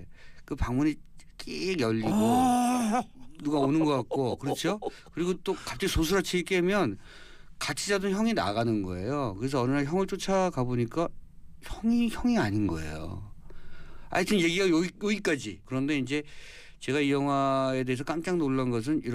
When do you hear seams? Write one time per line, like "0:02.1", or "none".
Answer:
0:15.5